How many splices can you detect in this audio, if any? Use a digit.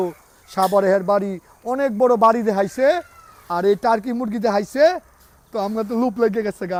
0